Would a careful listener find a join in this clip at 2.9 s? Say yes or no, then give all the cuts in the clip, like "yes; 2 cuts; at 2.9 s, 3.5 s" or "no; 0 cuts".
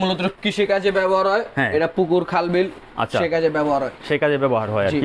no; 0 cuts